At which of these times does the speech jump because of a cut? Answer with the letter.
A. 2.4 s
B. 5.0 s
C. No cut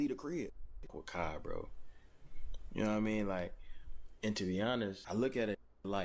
B